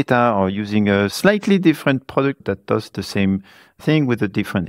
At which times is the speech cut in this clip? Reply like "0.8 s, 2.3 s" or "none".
1.1 s, 2.4 s, 3.8 s